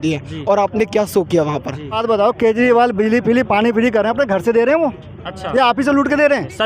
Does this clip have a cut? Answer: yes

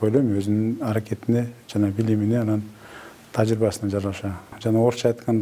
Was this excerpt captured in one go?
no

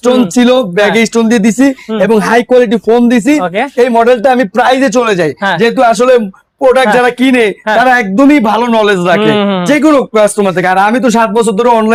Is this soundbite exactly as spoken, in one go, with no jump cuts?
yes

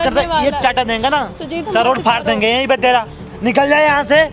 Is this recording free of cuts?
no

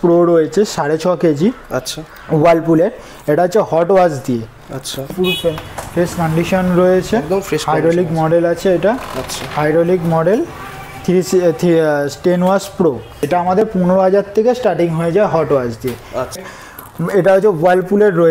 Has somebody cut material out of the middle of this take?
yes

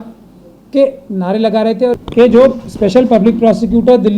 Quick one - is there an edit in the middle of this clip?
yes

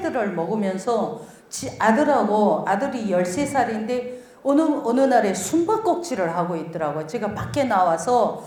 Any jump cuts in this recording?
no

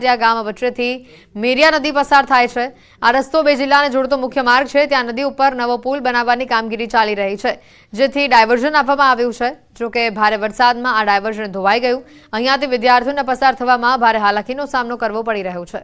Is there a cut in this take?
no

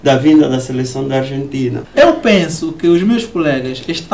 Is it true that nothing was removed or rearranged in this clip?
no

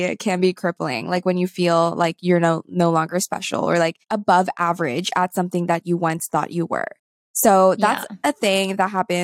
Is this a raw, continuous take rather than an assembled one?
yes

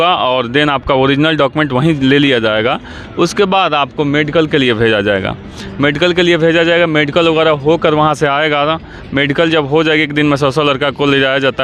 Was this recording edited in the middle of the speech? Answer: no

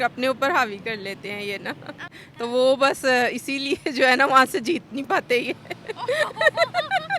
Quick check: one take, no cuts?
no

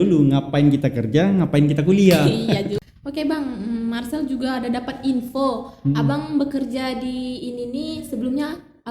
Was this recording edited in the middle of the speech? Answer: yes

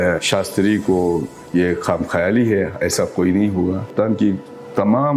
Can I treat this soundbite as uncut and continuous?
no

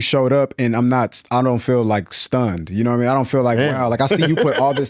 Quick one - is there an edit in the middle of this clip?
no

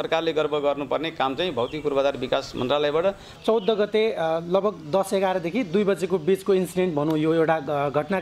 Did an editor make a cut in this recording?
yes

